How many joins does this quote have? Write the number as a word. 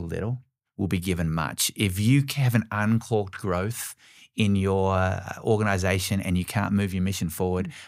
zero